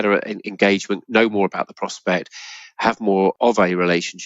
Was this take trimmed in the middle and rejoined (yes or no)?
yes